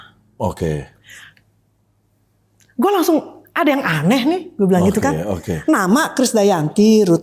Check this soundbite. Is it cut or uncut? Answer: uncut